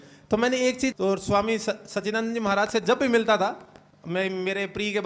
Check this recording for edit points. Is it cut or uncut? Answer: cut